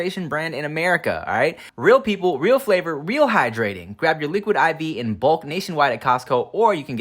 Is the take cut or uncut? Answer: cut